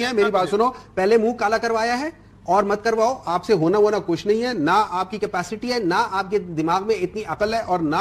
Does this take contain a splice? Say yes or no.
no